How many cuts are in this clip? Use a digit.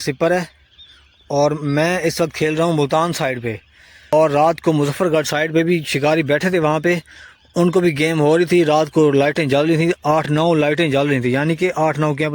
1